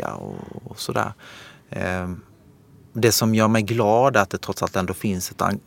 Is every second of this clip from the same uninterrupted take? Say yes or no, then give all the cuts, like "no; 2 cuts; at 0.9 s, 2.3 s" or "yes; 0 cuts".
yes; 0 cuts